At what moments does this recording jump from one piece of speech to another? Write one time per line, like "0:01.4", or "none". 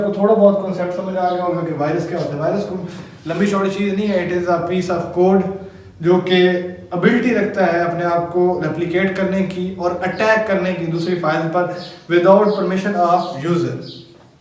none